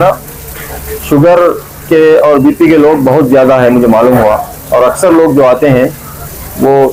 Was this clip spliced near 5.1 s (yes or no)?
no